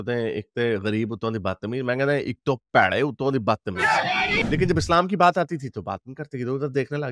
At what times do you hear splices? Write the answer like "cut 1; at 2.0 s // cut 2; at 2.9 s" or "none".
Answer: cut 1; at 4.4 s